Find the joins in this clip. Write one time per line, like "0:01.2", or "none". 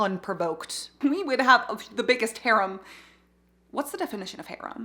0:01.0